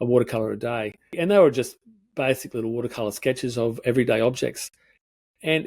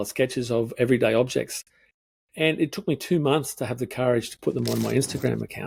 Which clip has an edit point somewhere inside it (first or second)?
first